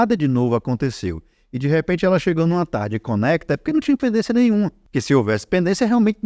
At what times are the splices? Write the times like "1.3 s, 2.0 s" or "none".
4.9 s

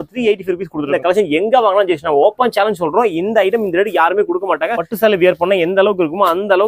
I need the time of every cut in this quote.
0.9 s, 4.9 s

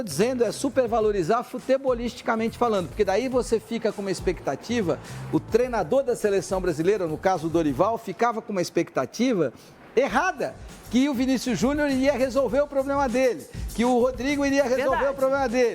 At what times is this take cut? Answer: 11.1 s

